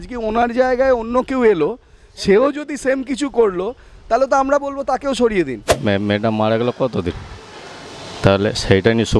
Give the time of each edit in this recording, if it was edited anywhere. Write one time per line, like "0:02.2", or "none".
0:05.6